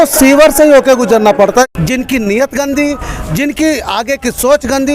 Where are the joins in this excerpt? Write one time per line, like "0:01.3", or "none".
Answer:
0:01.7